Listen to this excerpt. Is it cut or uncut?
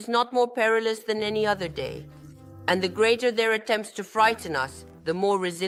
uncut